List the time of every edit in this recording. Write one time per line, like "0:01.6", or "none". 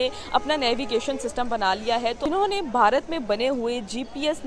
0:02.2